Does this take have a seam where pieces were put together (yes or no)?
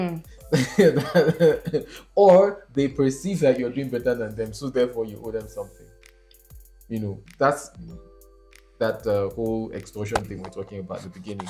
no